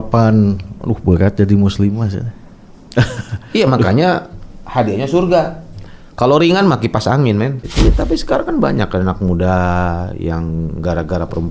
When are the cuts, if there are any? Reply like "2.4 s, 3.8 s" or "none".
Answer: 7.6 s